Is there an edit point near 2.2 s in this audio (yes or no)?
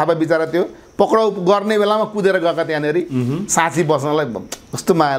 no